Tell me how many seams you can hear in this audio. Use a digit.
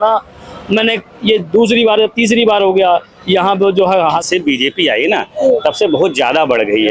1